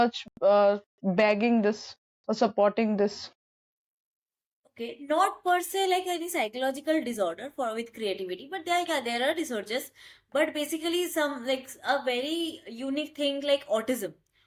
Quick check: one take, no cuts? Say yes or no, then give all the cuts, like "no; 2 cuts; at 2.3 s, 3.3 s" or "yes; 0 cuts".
yes; 0 cuts